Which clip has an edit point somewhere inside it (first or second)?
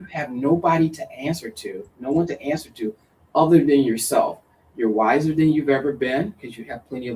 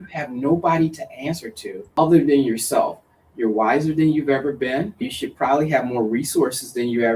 second